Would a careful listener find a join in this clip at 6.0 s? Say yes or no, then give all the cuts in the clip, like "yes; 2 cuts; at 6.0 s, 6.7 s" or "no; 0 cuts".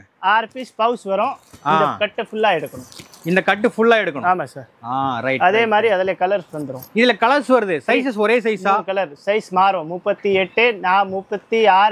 no; 0 cuts